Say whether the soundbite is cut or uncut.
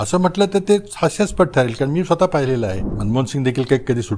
cut